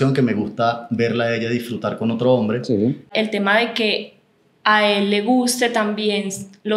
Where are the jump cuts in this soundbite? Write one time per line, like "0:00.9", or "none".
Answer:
0:03.1